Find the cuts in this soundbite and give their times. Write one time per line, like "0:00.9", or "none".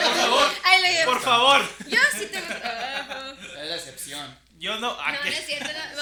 none